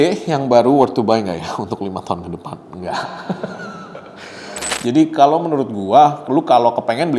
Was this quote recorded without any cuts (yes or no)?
no